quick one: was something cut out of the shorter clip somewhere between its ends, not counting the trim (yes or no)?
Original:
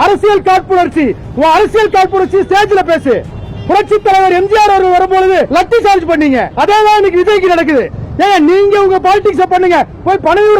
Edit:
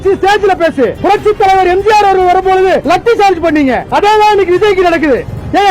yes